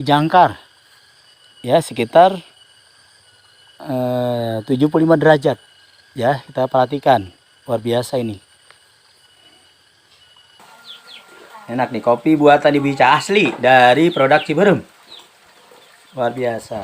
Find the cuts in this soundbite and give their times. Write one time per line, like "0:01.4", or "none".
0:10.6